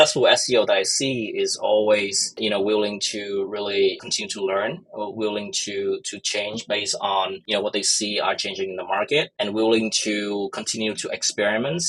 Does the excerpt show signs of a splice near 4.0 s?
yes; 2 cuts; at 4.0 s, 7.4 s

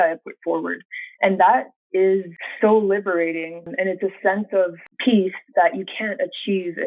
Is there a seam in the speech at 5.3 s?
no; 2 cuts; at 2.4 s, 3.7 s

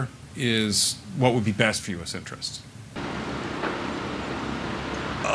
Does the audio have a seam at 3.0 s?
no; 0 cuts

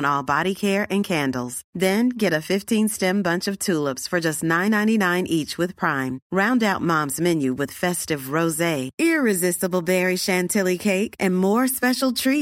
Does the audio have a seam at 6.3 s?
no; 0 cuts

